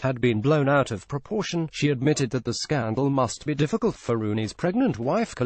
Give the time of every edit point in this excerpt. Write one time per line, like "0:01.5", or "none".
0:01.6